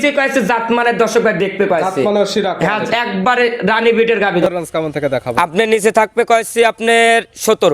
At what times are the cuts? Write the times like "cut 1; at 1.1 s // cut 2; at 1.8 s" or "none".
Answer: cut 1; at 4.4 s